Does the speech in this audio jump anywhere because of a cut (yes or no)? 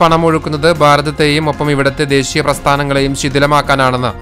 no